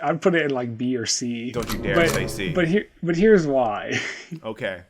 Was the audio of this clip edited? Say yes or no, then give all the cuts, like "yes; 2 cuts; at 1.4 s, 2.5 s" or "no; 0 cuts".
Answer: yes; 1 cut; at 1.5 s